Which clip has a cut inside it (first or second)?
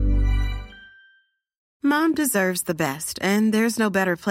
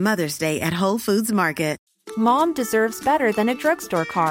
second